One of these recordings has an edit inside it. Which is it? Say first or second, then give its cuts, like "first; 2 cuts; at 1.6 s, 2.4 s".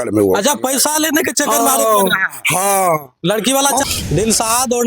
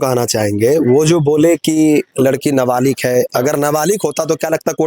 first; 1 cut; at 3.9 s